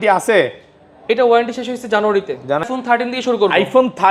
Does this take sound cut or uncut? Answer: cut